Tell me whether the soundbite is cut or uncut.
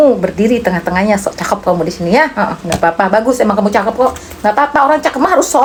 uncut